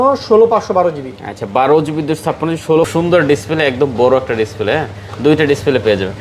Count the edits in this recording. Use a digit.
1